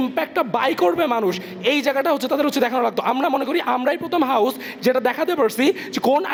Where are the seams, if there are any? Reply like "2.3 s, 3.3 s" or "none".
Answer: none

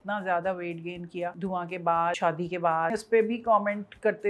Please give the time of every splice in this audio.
1.3 s, 2.2 s, 3.0 s

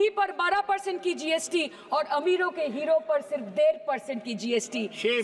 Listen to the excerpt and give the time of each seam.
none

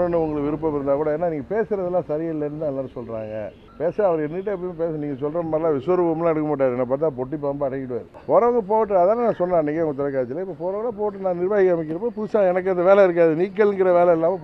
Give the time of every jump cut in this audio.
3.6 s, 8.1 s

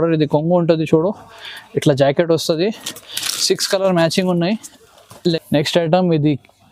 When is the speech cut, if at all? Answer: 5.4 s

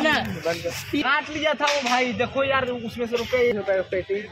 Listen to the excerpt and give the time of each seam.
1.0 s, 3.5 s

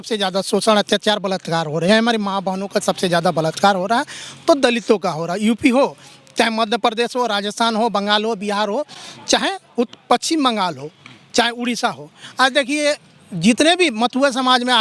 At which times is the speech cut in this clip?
none

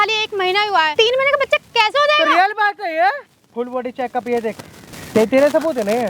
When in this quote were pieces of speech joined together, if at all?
0.9 s, 3.4 s

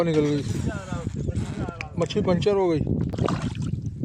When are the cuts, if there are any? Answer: 3.1 s

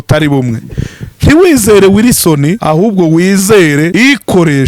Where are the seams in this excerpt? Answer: 2.6 s, 3.9 s

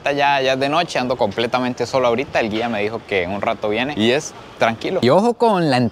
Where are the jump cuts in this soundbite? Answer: 5.0 s

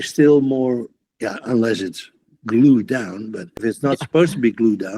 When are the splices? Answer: 1.0 s, 3.5 s

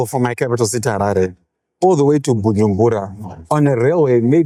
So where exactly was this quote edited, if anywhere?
none

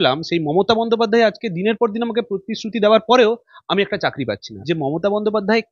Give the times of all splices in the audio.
4.5 s

